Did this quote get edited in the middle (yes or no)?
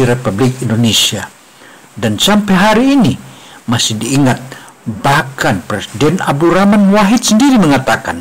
no